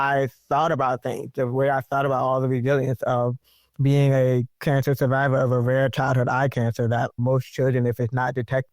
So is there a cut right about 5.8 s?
no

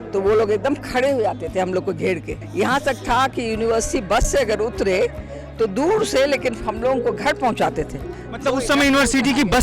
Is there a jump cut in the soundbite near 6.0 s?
no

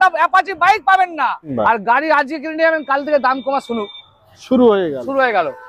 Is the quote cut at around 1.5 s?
yes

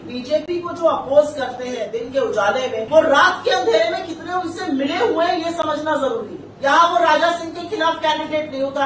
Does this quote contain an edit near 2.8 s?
yes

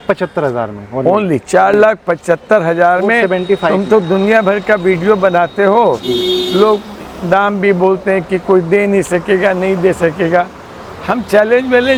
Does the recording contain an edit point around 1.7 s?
no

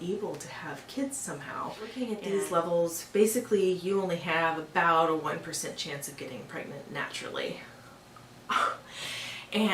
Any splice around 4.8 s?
no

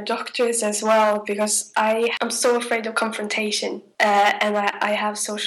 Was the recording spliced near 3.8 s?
yes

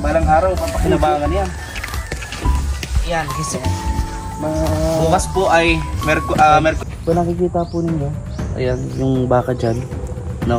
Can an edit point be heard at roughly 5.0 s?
no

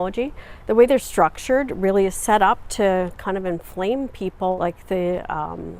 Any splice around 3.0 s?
no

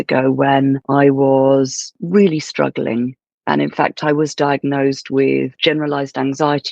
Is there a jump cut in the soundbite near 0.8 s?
yes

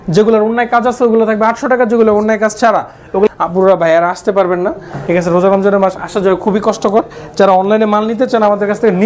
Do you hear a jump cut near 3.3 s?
yes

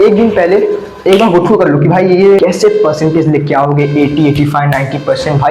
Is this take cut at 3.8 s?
no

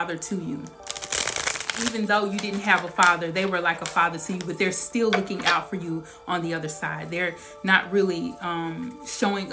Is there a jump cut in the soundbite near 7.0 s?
no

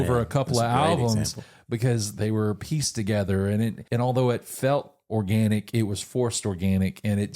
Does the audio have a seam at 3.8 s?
yes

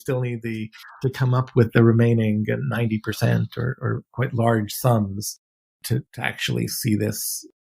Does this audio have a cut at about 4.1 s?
yes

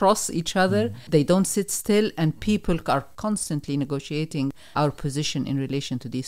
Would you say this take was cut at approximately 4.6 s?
yes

